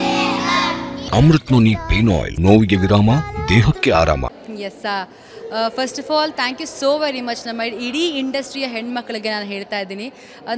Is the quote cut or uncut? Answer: cut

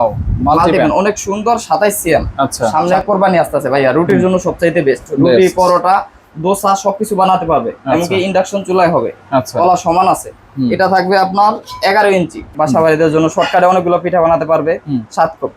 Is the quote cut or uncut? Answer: cut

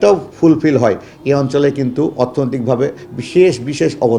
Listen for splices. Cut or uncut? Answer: uncut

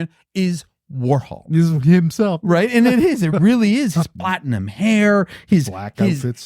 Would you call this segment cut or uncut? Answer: cut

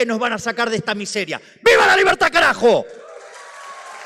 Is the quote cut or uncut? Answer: uncut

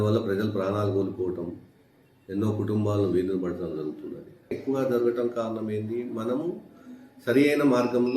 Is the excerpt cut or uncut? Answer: cut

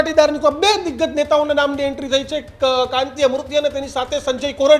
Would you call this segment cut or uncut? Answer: uncut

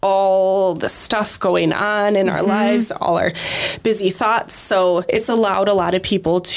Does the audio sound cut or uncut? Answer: cut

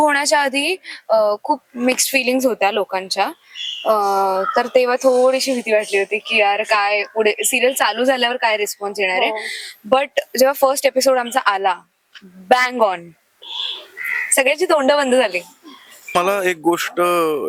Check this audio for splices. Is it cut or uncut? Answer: cut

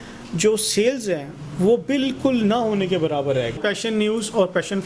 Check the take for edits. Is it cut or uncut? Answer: cut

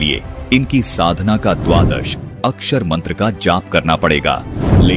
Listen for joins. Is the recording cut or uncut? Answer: uncut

